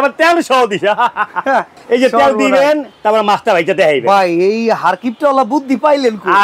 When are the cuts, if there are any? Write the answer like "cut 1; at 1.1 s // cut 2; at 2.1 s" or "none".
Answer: cut 1; at 1.8 s // cut 2; at 2.9 s